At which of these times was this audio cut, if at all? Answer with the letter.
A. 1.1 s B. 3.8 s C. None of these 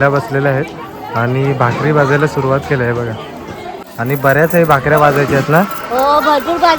B